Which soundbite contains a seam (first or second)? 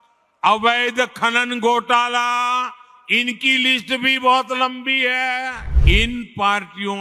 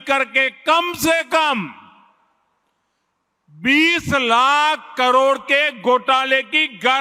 first